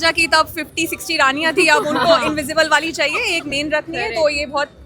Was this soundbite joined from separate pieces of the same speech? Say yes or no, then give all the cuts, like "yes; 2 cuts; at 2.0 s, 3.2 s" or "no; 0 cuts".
no; 0 cuts